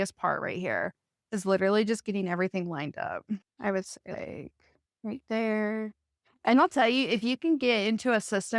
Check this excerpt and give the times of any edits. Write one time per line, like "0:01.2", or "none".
0:03.5